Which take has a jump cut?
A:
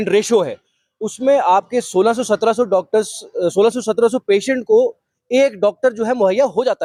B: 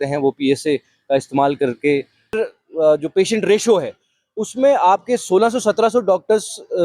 B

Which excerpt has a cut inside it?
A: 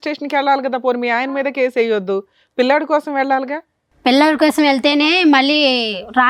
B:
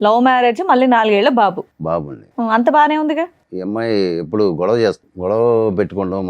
B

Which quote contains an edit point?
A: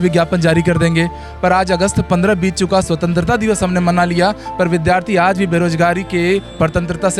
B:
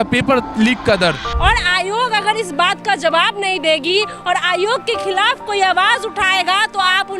B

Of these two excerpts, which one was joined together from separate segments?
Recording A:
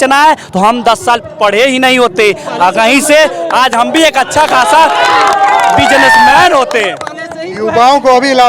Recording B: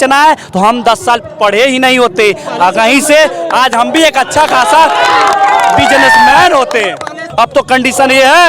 B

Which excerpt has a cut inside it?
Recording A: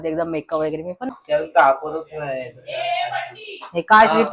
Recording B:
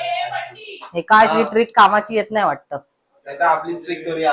A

